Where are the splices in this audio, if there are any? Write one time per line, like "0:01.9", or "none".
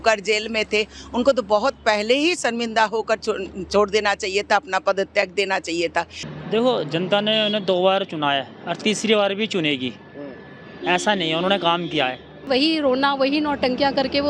0:06.2
0:12.5